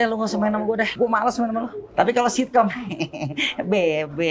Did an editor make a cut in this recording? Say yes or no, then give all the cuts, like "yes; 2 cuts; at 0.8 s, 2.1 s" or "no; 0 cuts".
yes; 2 cuts; at 0.9 s, 1.8 s